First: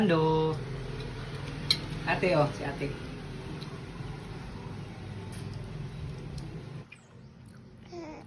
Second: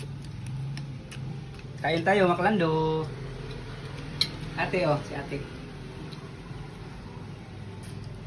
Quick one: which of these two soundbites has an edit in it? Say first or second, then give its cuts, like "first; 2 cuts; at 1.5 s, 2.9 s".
first; 1 cut; at 6.8 s